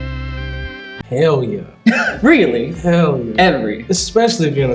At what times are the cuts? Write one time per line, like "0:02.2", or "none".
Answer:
0:00.9